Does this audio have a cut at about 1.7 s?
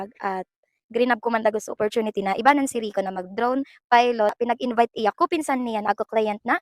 no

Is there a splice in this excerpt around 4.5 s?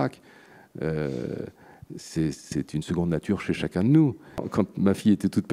yes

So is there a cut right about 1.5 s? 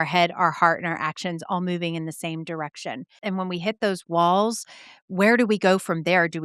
no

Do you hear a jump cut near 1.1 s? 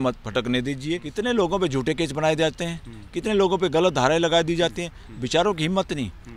yes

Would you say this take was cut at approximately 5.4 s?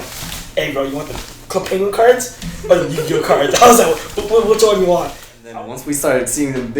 yes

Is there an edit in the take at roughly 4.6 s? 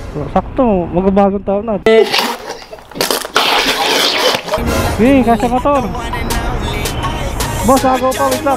yes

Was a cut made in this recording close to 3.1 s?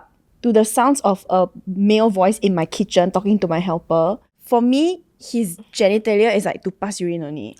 no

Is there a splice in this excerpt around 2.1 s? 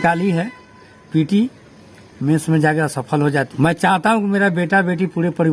no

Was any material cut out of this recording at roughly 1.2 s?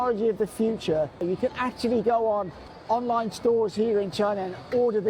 yes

